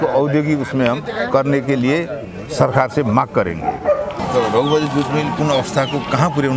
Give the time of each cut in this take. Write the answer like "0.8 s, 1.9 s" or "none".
4.2 s